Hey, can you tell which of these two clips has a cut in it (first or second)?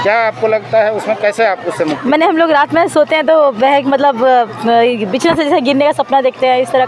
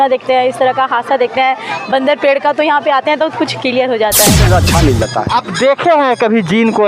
second